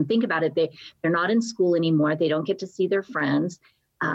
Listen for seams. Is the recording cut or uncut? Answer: uncut